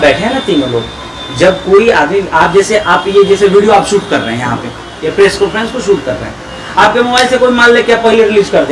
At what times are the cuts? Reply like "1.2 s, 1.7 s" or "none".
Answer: none